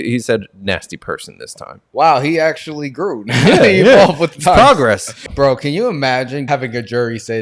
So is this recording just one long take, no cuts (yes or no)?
no